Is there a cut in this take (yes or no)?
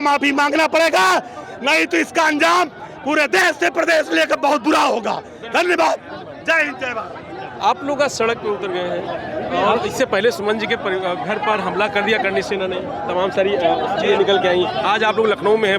no